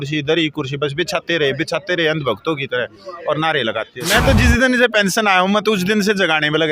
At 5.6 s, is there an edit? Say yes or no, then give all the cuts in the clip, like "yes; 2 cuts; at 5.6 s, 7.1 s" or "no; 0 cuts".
no; 1 cut; at 4.0 s